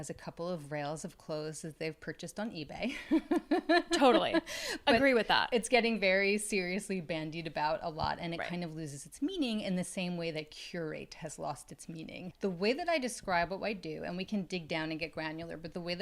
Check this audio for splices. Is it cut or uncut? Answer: uncut